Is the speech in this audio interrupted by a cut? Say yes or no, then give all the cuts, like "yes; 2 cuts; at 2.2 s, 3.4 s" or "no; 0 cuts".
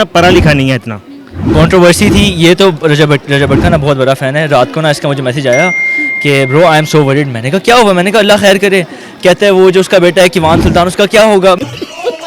yes; 1 cut; at 1.4 s